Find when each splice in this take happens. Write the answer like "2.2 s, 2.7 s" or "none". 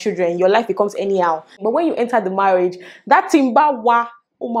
1.5 s